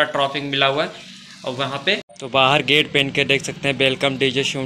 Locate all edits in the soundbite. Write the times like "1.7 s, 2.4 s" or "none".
2.1 s